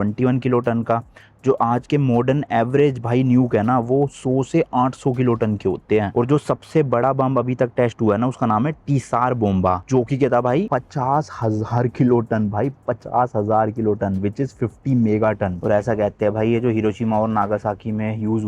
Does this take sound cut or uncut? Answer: cut